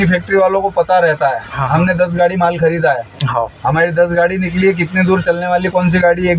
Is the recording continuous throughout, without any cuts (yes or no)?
yes